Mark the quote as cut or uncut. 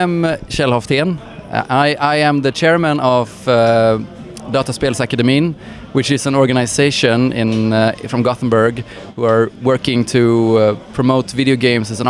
cut